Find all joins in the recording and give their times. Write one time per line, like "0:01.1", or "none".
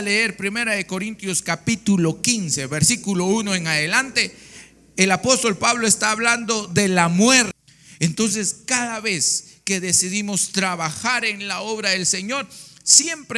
0:07.6